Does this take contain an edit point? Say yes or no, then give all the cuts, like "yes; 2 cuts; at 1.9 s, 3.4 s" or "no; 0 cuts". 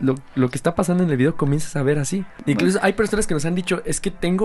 yes; 1 cut; at 2.3 s